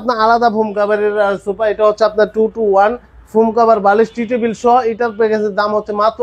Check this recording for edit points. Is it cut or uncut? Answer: uncut